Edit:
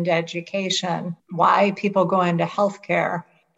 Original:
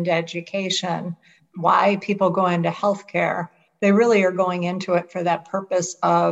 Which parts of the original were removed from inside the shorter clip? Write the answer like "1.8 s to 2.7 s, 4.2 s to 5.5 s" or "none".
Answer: 1.2 s to 1.4 s